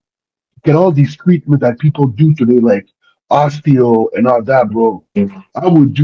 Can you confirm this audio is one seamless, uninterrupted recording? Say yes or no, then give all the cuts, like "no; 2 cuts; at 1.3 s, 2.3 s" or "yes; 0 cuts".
yes; 0 cuts